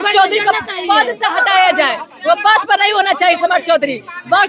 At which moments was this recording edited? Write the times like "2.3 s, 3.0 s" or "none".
none